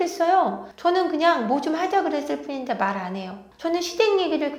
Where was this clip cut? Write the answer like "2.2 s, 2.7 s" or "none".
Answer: 3.4 s